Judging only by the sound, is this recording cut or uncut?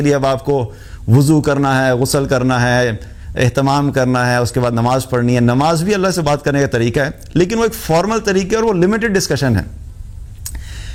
uncut